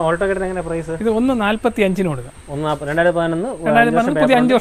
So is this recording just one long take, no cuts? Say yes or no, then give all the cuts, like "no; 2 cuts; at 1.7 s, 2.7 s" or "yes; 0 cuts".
yes; 0 cuts